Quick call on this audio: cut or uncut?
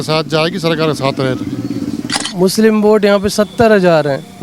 cut